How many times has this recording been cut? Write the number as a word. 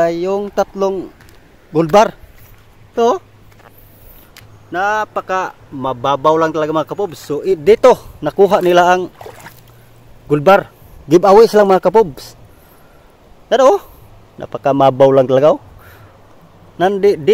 zero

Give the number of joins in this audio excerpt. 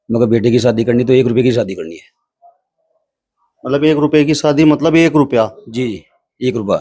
zero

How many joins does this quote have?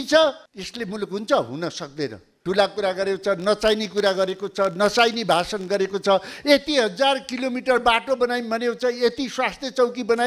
one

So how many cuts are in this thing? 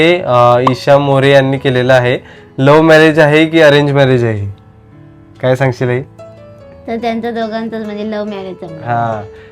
zero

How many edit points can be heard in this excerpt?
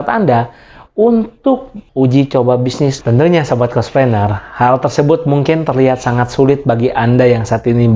one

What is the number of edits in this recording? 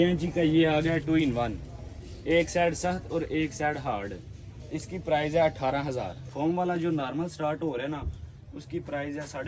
one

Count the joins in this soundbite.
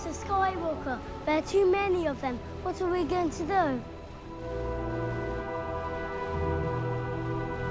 zero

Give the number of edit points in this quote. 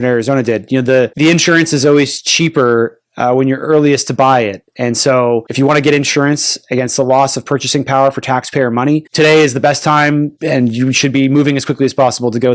four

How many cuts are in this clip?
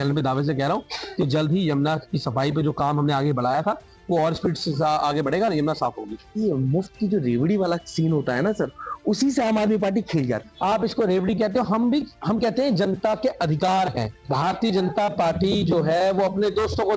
three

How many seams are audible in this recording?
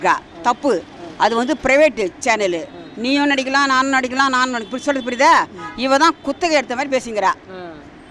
zero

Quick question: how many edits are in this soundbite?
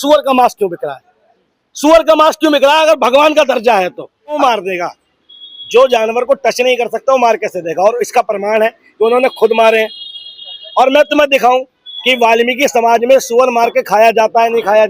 one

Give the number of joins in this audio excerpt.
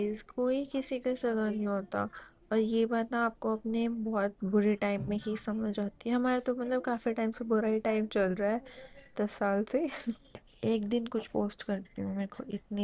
one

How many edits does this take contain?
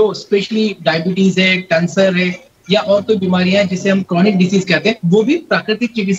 one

